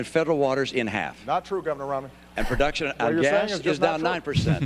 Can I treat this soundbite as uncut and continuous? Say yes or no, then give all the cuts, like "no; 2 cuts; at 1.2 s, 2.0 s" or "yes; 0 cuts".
no; 1 cut; at 2.5 s